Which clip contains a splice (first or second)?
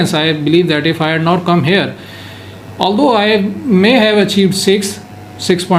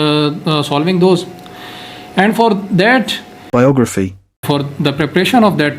second